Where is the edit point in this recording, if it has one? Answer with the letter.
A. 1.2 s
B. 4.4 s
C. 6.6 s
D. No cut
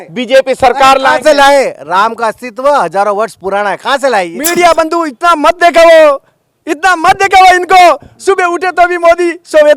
B